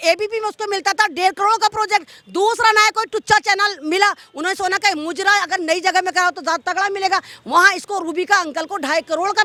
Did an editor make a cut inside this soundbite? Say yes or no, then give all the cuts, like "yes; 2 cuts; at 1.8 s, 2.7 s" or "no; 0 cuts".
no; 0 cuts